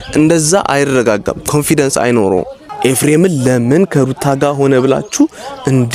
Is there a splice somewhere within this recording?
no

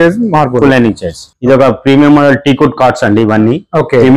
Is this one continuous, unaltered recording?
no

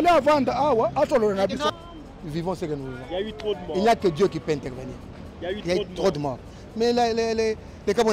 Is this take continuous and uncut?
no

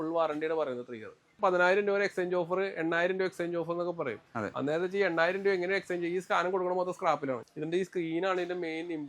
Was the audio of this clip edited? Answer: yes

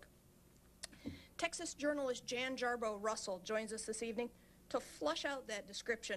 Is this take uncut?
yes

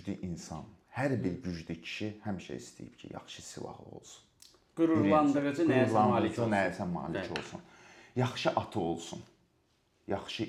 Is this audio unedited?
yes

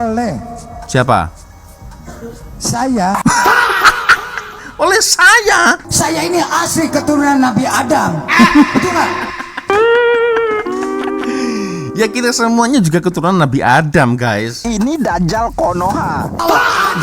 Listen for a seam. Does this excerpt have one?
yes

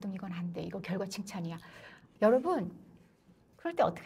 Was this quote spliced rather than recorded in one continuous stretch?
yes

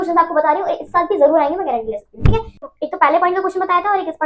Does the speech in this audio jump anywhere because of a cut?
yes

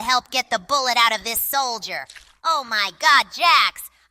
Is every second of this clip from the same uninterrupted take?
yes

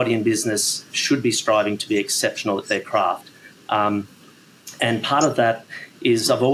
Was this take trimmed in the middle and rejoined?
no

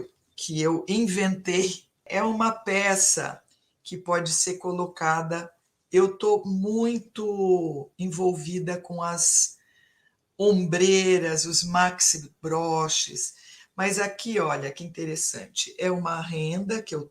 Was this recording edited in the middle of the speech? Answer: yes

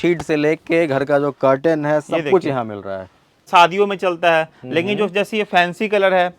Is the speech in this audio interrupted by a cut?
yes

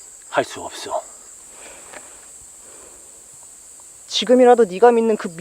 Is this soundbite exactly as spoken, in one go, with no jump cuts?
no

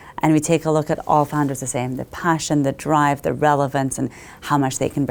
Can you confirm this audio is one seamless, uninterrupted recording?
yes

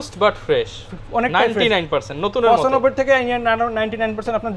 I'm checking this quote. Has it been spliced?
no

